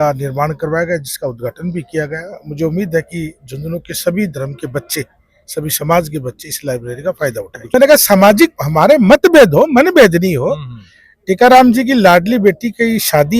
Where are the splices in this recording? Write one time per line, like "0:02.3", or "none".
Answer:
0:07.6